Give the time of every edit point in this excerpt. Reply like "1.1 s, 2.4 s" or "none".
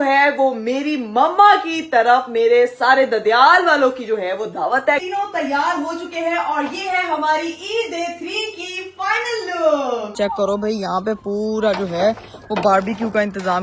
5.0 s, 10.1 s